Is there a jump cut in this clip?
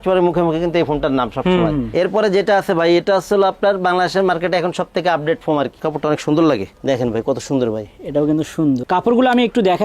yes; 3 cuts; at 1.9 s, 5.8 s, 8.8 s

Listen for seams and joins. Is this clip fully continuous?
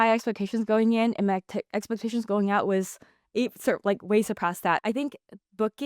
no; 1 cut; at 4.8 s

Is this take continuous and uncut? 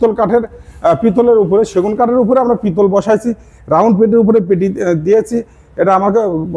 yes; 0 cuts

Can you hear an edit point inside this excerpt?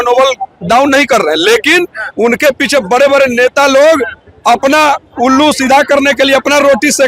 no; 0 cuts

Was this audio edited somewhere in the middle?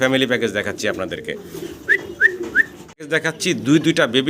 yes; 1 cut; at 3.1 s

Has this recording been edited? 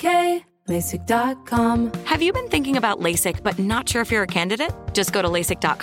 yes; 1 cut; at 1.8 s

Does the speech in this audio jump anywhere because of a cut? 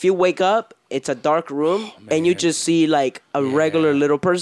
no; 0 cuts

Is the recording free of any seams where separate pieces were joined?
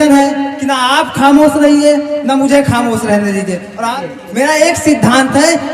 no; 1 cut; at 3.9 s

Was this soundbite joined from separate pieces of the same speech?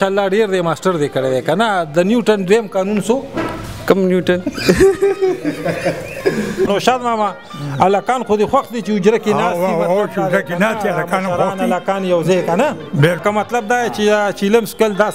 yes; 2 cuts; at 6.7 s, 13.2 s

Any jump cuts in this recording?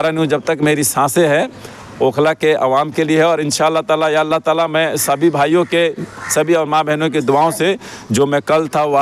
no; 0 cuts

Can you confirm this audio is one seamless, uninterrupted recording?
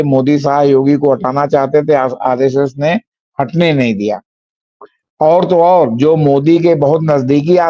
yes; 0 cuts

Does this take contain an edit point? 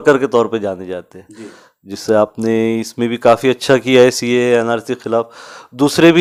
no; 0 cuts

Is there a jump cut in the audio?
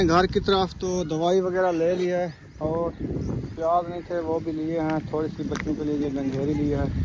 no; 0 cuts

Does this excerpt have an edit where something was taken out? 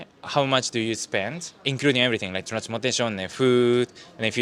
no; 0 cuts

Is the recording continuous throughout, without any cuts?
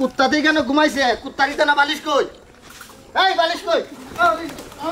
yes; 0 cuts

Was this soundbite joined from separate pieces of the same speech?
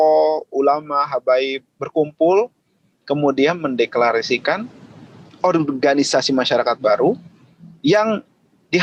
no; 0 cuts

